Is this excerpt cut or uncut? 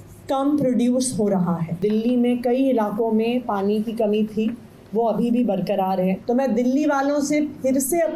cut